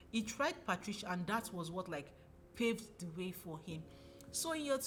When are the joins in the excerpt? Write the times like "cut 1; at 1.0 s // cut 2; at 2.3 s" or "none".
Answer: none